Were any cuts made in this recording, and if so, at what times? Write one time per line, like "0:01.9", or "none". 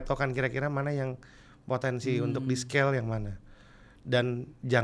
none